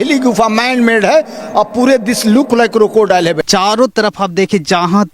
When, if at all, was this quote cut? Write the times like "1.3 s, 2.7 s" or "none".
3.4 s